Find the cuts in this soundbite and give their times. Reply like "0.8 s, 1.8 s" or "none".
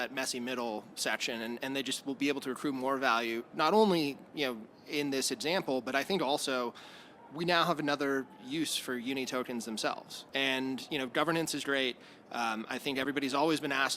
10.2 s